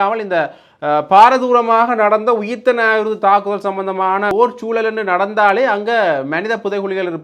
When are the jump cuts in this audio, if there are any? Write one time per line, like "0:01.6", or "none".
0:04.3